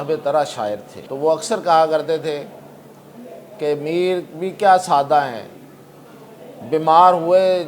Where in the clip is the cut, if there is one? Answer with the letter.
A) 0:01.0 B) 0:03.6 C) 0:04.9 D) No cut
A